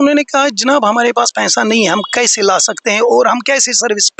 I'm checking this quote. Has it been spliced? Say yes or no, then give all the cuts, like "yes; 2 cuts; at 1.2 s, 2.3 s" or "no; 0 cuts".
no; 0 cuts